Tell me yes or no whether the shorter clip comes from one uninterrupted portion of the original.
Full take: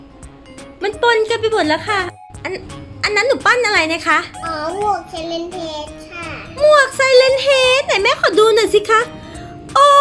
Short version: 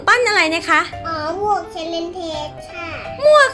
yes